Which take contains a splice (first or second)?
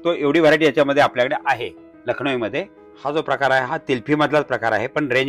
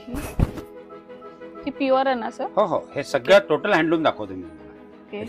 first